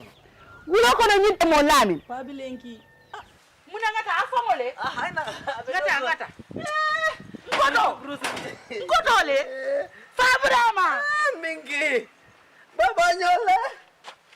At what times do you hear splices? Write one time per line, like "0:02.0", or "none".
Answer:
0:01.4